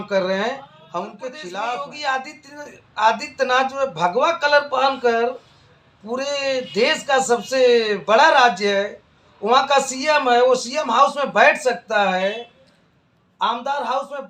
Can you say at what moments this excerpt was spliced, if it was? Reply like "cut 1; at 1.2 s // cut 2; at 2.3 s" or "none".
cut 1; at 1.5 s